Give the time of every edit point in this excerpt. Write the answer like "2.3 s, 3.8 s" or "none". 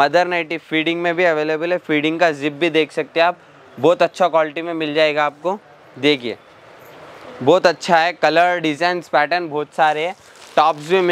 none